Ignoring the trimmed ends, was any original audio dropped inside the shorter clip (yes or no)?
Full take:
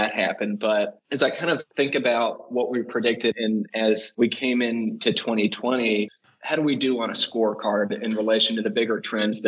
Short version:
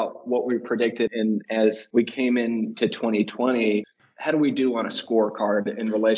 no